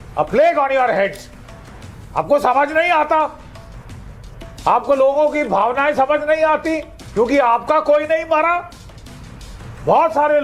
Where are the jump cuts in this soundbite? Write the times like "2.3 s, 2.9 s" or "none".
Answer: none